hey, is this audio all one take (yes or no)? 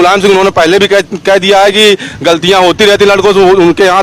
yes